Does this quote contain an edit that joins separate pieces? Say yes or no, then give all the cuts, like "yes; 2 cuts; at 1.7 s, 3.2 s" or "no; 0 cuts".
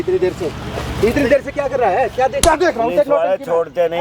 yes; 1 cut; at 2.4 s